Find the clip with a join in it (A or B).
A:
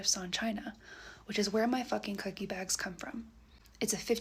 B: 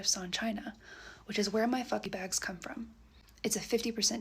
B